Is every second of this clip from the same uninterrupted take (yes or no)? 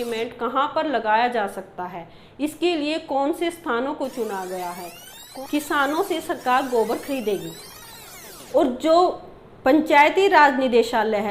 no